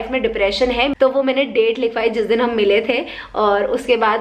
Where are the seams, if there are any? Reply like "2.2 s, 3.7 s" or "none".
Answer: 0.9 s